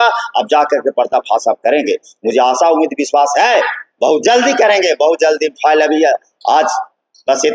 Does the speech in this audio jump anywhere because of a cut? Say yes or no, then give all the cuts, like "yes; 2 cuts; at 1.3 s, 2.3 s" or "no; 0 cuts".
no; 0 cuts